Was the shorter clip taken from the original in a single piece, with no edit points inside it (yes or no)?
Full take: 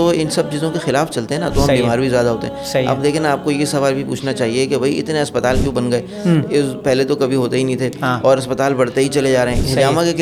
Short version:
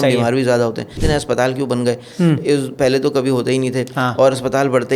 no